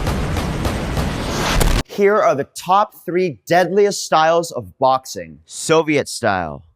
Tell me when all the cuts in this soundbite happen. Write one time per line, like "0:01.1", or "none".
0:01.8